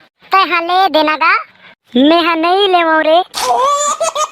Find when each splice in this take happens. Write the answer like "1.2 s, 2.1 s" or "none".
3.4 s